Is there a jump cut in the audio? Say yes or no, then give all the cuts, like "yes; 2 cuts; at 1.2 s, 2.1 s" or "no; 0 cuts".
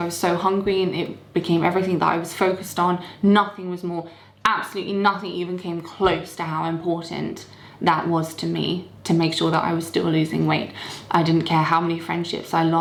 no; 0 cuts